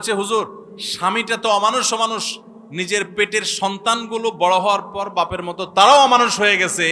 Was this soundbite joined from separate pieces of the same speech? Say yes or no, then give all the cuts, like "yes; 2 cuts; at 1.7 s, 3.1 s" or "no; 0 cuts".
no; 0 cuts